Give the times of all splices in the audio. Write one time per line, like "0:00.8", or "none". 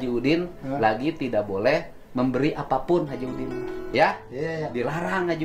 none

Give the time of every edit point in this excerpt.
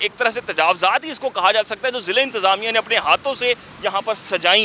none

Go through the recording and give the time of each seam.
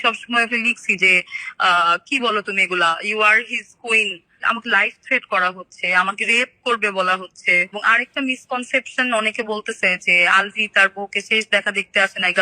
0:04.4
0:07.7

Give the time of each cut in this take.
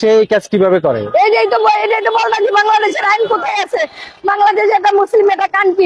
none

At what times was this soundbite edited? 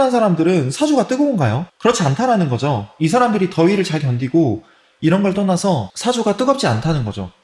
none

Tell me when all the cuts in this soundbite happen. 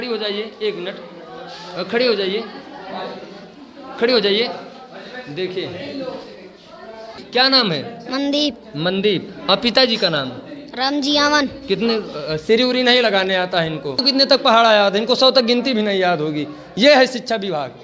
0:07.2
0:14.0

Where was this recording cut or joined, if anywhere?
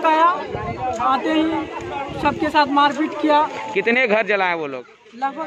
none

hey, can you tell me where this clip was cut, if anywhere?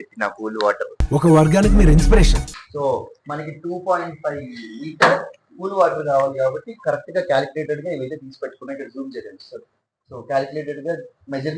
none

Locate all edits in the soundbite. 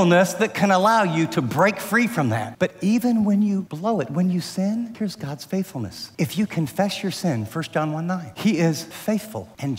0:02.5
0:03.7
0:04.9
0:06.0
0:08.3
0:08.9

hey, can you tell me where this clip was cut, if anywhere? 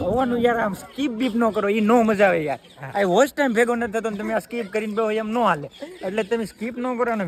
0:05.8

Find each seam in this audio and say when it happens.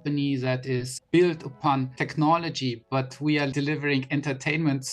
0:00.9
0:02.0
0:03.5

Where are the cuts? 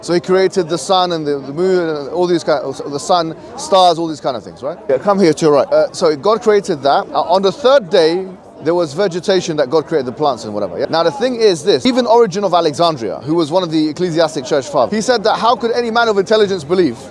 0:04.7
0:05.8
0:07.1
0:10.9
0:11.9
0:14.9

